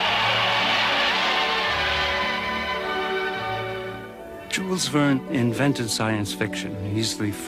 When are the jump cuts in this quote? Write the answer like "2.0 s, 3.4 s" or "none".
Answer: 5.8 s